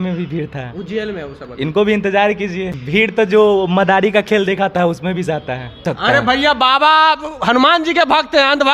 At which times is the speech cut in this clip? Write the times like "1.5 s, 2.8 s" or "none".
2.8 s, 5.9 s